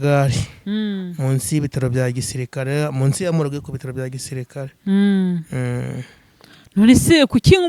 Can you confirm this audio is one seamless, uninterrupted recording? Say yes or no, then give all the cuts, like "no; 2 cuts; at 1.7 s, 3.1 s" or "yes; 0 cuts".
yes; 0 cuts